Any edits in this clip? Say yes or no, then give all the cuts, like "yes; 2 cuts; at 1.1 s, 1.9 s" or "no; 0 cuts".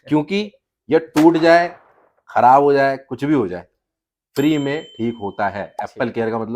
no; 0 cuts